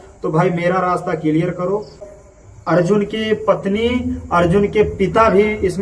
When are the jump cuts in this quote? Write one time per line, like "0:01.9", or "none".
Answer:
0:02.0